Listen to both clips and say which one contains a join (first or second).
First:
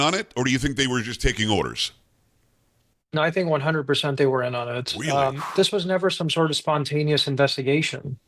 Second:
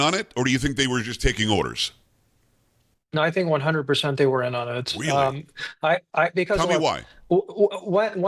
first